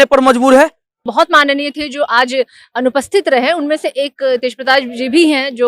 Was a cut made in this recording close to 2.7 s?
no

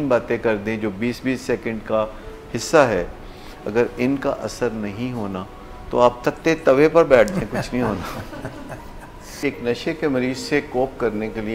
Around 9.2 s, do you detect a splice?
yes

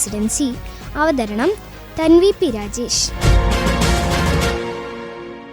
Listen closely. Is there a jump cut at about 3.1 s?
yes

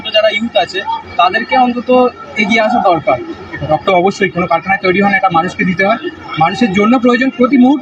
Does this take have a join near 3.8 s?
yes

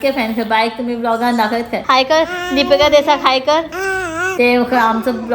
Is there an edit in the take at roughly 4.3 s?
yes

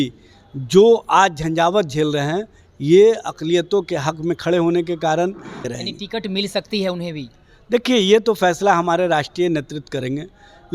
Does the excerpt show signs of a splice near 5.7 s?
yes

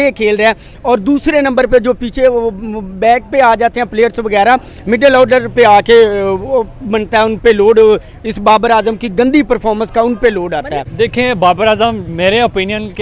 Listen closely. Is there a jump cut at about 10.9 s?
yes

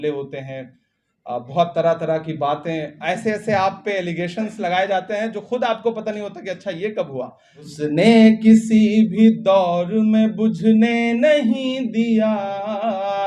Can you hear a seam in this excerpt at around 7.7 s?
yes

